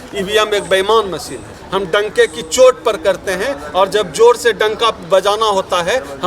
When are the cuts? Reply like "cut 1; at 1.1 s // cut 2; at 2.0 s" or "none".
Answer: cut 1; at 1.5 s